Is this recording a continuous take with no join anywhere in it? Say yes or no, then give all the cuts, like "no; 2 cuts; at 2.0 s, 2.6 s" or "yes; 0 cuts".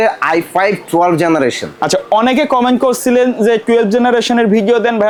yes; 0 cuts